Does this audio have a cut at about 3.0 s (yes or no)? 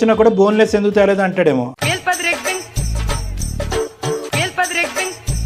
no